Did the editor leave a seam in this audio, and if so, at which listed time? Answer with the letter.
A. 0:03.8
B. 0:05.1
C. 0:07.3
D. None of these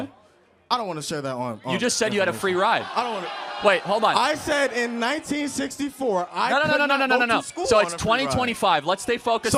D